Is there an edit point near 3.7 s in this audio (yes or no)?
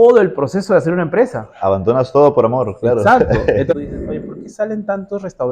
yes